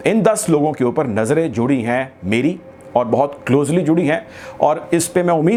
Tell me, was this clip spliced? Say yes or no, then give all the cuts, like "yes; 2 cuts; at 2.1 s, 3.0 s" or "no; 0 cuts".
no; 0 cuts